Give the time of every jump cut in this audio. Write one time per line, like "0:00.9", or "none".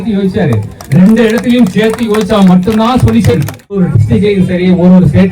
0:03.8